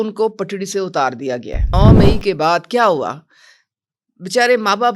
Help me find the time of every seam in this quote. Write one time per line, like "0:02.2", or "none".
0:01.7